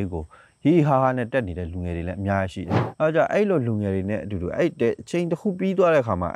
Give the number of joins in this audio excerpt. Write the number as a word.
one